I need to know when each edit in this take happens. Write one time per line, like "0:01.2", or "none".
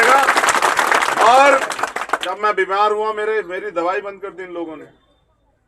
0:02.2